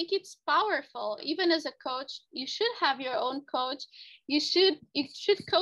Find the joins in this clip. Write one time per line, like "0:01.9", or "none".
0:01.2